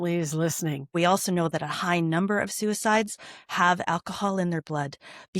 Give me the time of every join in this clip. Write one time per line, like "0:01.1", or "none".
0:00.9